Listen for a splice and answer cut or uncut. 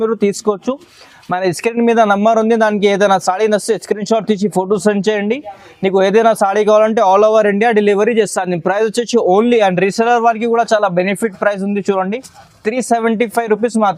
uncut